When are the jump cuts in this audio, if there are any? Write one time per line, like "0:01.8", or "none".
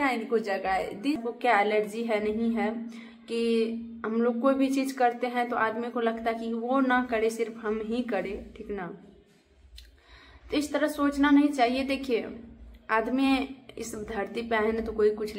0:01.2